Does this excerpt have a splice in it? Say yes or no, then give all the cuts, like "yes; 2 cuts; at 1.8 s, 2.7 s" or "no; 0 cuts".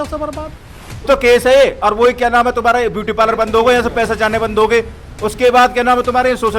yes; 1 cut; at 1.1 s